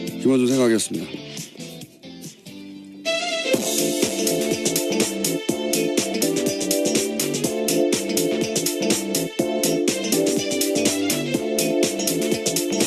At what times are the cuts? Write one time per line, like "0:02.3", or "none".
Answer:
none